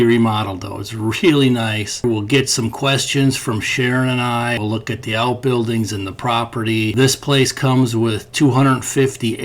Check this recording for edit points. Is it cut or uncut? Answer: cut